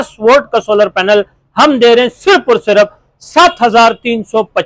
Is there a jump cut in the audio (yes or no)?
no